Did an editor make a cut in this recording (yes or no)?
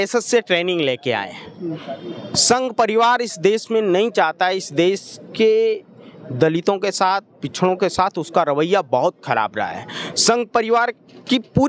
no